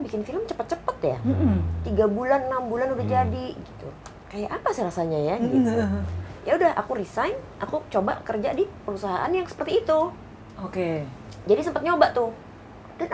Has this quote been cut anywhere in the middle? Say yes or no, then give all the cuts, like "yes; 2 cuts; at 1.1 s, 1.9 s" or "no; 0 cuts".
no; 0 cuts